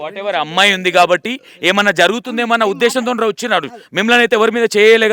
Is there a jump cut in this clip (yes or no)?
no